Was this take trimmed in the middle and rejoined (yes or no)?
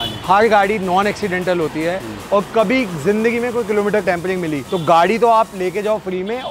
yes